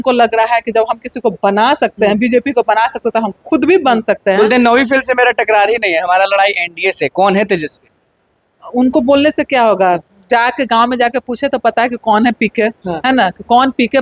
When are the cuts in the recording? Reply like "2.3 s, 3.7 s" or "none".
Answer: none

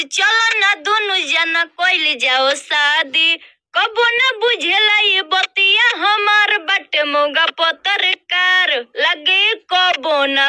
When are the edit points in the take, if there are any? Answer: none

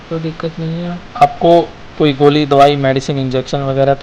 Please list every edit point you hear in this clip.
1.0 s, 1.8 s

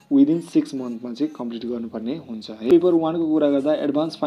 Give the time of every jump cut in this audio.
2.7 s

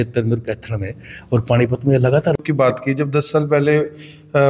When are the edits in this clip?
2.4 s

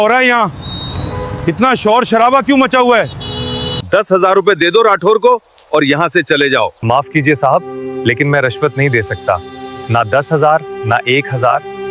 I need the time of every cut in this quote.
3.8 s, 6.7 s

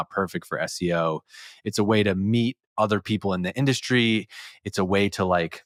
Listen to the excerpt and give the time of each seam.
none

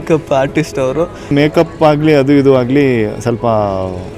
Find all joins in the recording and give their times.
1.3 s

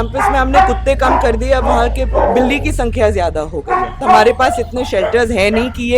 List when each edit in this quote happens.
4.0 s

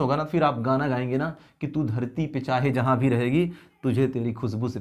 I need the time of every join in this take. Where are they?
none

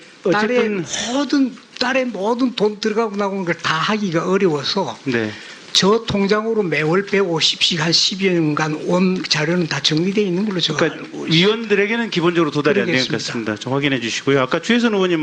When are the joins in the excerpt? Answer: 1.5 s

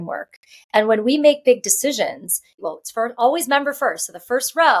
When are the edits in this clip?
2.5 s

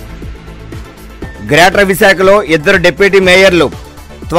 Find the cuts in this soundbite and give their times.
1.4 s

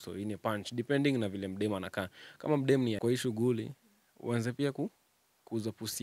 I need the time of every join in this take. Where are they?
3.0 s

